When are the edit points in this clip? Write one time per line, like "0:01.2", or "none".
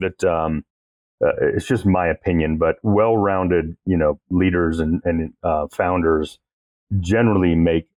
none